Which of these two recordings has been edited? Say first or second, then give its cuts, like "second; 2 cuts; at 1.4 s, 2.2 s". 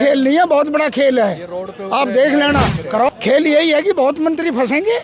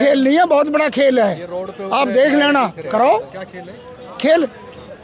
first; 1 cut; at 3.1 s